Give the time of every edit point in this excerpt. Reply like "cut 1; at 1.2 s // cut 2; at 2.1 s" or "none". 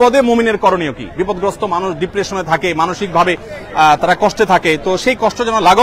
none